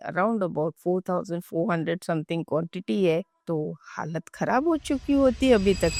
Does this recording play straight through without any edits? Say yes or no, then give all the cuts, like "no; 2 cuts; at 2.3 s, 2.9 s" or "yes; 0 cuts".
yes; 0 cuts